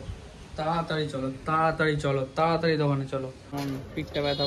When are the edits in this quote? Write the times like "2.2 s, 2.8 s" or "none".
3.5 s